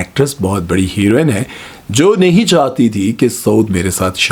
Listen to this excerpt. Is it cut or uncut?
uncut